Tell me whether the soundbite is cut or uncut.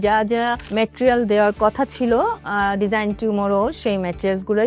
uncut